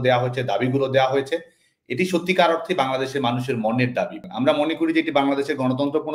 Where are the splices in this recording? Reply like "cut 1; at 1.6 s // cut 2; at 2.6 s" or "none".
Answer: cut 1; at 4.2 s